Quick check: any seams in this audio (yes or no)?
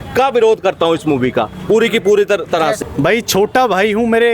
no